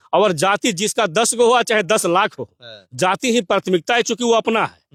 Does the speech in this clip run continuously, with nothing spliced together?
yes; 0 cuts

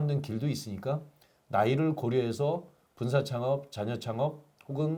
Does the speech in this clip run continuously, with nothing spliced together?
yes; 0 cuts

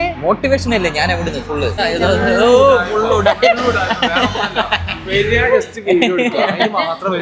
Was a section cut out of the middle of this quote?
yes; 1 cut; at 1.8 s

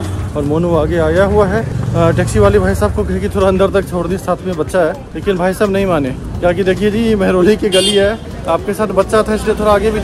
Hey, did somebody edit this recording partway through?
no; 0 cuts

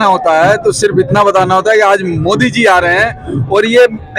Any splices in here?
no; 0 cuts

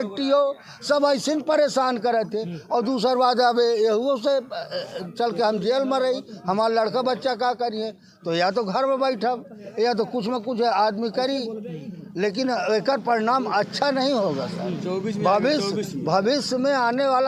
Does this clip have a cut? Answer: no; 0 cuts

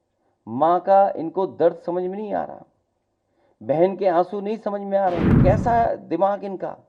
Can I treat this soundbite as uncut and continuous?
no; 1 cut; at 5.4 s

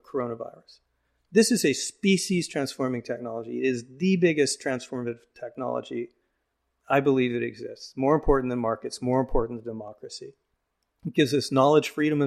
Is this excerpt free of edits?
yes; 0 cuts

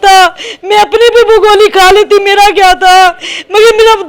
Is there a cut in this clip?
no; 0 cuts

